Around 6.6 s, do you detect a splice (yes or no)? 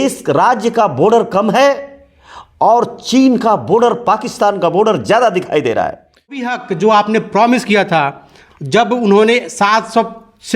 yes